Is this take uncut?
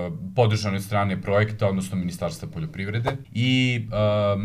no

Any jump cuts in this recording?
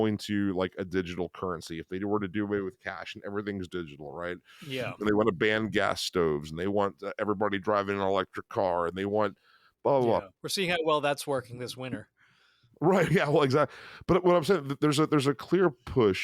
yes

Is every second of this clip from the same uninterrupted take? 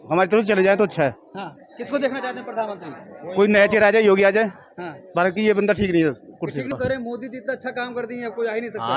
no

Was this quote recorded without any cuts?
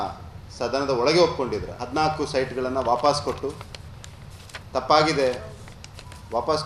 no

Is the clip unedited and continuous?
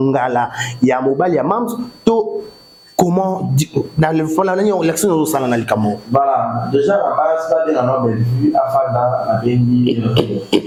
yes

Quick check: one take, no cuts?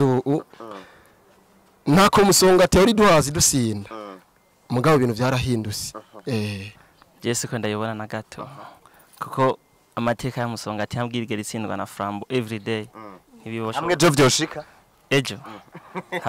no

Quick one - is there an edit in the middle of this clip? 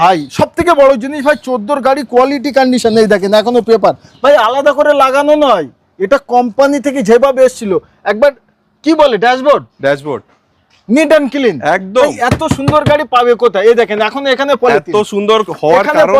no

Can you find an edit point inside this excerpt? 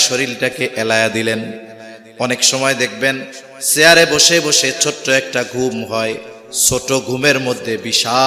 no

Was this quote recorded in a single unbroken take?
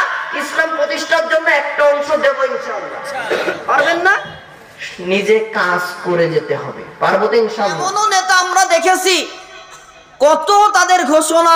no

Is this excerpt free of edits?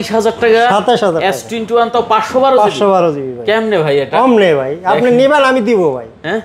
yes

